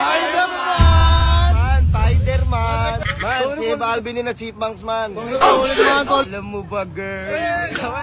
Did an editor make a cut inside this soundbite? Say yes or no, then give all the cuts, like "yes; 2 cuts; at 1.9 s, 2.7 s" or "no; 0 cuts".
yes; 2 cuts; at 3.1 s, 6.3 s